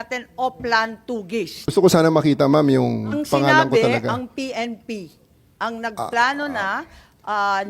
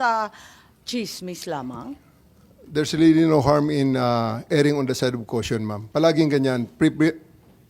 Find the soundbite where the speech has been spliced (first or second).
first